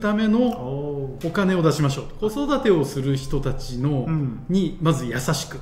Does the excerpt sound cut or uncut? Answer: cut